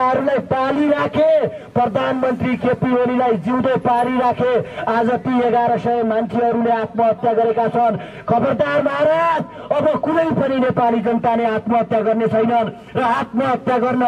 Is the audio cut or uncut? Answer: uncut